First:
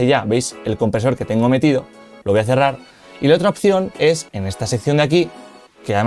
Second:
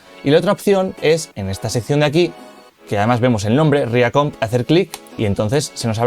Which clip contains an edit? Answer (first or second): second